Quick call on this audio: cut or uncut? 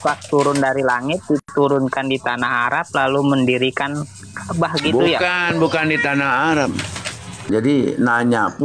cut